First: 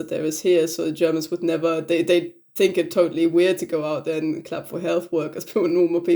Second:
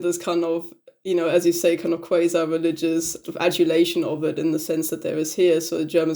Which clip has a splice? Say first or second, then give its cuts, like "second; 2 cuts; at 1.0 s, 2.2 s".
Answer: second; 1 cut; at 3.2 s